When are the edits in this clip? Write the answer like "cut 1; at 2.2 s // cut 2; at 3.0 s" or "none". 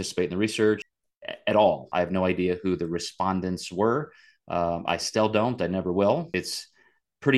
cut 1; at 0.9 s // cut 2; at 1.9 s // cut 3; at 6.3 s